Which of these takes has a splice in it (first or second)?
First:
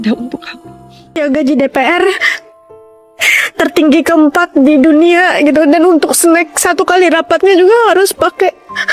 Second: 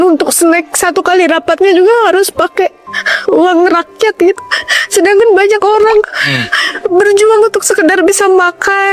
first